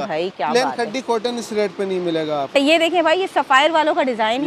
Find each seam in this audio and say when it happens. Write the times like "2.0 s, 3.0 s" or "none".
2.7 s